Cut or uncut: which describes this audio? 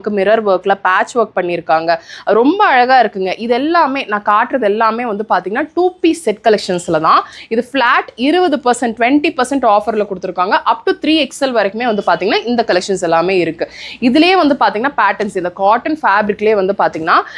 uncut